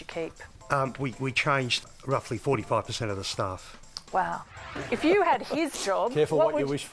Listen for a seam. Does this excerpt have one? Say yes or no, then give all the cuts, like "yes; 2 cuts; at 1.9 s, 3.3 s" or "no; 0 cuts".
yes; 2 cuts; at 1.8 s, 4.5 s